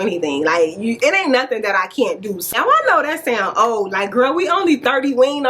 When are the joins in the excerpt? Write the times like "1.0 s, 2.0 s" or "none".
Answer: 2.6 s